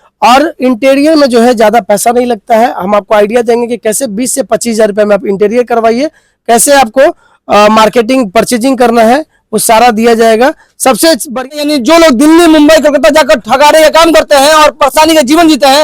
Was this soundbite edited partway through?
yes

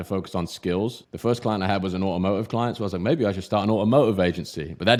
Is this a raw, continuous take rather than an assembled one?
yes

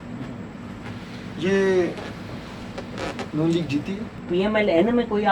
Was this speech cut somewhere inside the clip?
yes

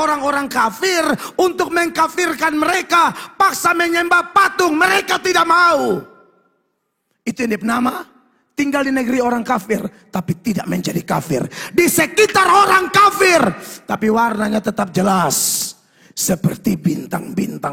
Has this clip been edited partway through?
no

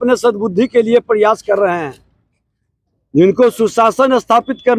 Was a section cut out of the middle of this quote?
no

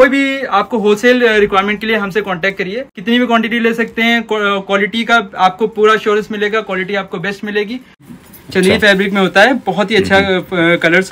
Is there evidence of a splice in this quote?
yes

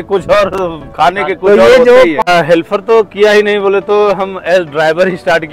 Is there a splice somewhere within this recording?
yes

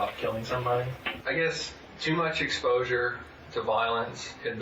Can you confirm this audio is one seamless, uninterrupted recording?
no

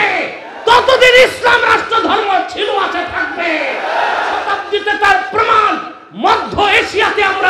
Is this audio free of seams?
no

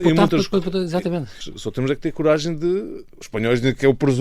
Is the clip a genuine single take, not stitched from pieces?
no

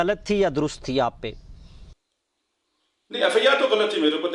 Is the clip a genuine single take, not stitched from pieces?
yes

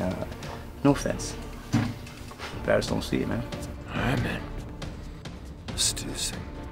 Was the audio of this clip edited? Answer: no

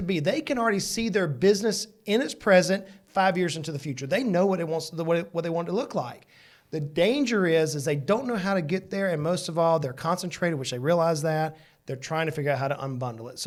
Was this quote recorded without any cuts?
yes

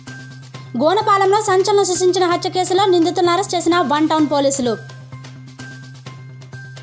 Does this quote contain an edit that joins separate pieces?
no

